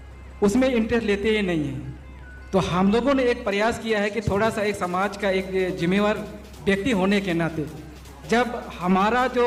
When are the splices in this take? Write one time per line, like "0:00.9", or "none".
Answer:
none